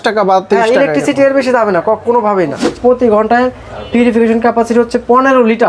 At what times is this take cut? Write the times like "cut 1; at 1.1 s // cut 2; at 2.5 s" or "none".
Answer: cut 1; at 2.6 s